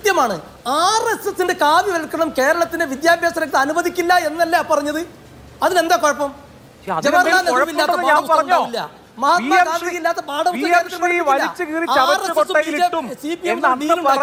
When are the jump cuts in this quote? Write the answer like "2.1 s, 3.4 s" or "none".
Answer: none